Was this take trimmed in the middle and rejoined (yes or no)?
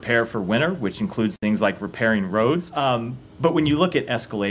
yes